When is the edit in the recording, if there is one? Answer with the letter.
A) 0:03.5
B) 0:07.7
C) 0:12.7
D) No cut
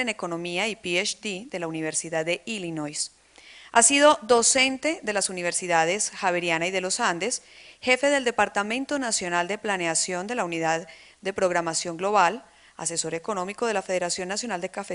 A